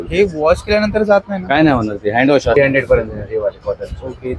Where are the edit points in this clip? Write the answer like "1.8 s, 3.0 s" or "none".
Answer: 2.6 s